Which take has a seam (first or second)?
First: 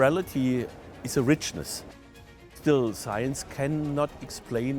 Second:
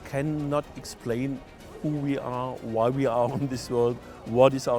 first